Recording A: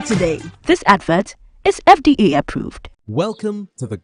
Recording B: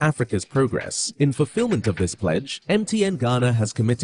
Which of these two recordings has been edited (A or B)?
A